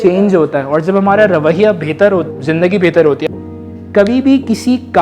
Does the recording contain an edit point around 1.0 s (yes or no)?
no